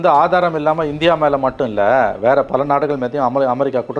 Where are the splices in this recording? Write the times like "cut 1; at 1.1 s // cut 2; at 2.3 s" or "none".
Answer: none

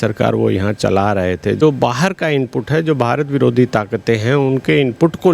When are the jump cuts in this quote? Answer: cut 1; at 1.6 s

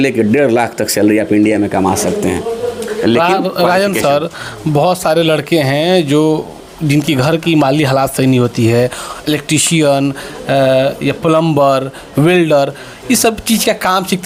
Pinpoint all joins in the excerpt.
none

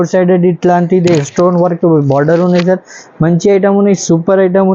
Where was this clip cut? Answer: none

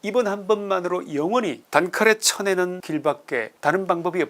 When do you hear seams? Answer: cut 1; at 1.6 s // cut 2; at 3.2 s

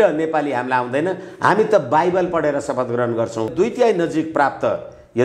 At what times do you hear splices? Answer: cut 1; at 3.5 s

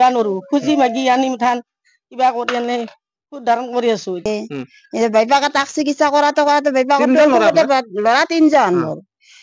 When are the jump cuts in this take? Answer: cut 1; at 4.2 s

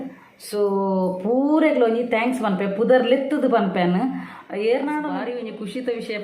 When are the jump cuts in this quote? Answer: cut 1; at 5.1 s

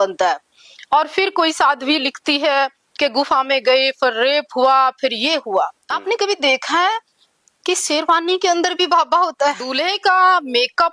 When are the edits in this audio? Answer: cut 1; at 5.9 s // cut 2; at 9.7 s

